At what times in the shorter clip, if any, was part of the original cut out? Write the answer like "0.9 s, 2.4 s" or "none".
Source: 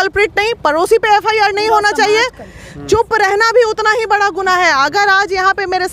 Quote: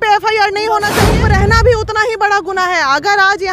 1.1 s